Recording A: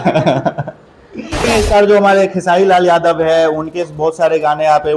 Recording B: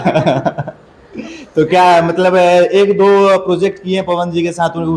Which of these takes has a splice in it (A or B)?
A